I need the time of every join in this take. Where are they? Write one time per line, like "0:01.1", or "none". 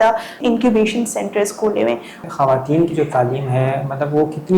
0:02.2